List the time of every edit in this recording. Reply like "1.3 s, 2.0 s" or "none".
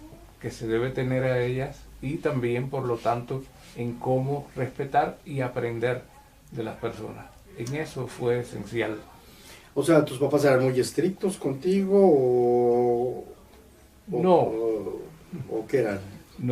4.7 s